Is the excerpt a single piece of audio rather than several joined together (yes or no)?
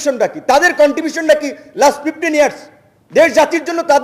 yes